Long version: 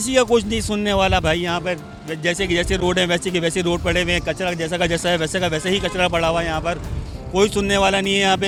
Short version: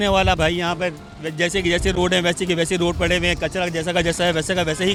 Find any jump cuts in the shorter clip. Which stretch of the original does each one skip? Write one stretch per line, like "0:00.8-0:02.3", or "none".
none